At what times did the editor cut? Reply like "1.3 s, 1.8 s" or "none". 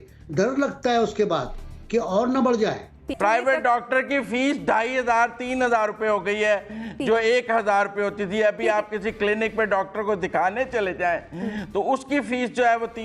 3.1 s